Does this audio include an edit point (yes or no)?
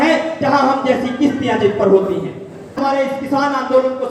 yes